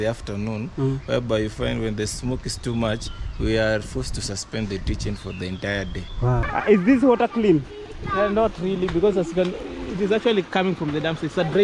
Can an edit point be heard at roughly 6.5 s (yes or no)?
yes